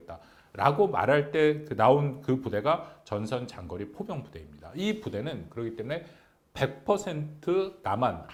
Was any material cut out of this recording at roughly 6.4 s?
no; 0 cuts

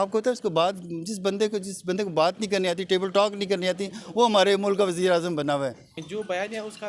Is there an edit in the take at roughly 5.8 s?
yes; 1 cut; at 5.8 s

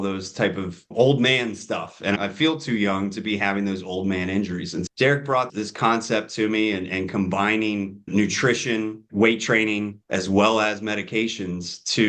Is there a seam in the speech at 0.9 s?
no; 1 cut; at 2.2 s

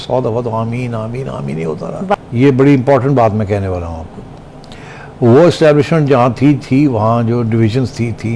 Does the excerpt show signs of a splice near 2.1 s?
yes; 1 cut; at 2.1 s

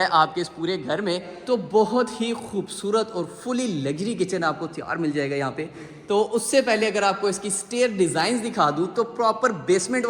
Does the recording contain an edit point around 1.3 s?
yes; 2 cuts; at 1.3 s, 5.9 s

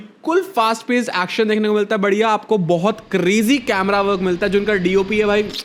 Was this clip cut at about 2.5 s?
no; 0 cuts

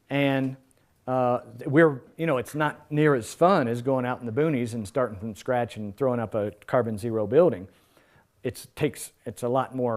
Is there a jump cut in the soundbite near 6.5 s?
no; 1 cut; at 1.5 s

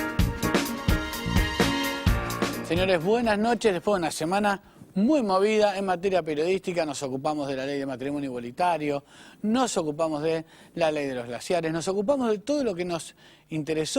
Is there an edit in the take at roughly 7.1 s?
no; 1 cut; at 2.6 s

